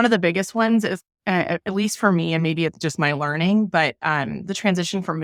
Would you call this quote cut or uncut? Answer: uncut